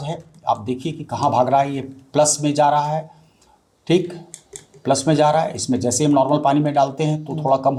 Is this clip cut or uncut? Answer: uncut